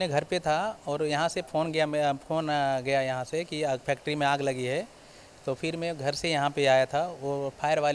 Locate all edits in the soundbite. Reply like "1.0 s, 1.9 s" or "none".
none